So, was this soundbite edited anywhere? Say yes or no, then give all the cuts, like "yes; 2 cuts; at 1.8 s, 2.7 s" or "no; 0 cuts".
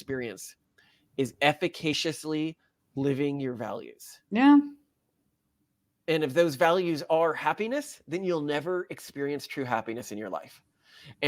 no; 0 cuts